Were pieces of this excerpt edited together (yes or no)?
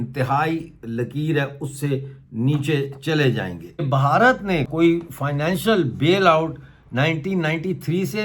yes